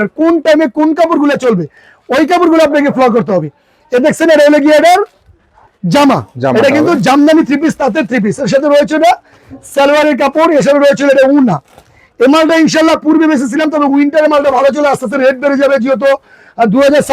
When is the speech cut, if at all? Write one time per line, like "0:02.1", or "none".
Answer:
none